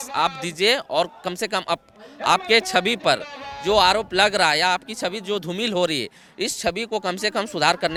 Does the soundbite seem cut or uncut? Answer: uncut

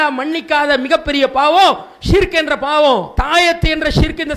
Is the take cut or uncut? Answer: cut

